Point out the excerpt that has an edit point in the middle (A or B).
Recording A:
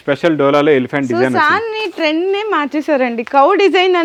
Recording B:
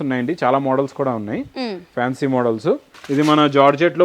B